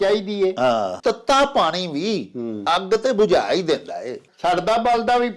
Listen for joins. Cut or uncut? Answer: cut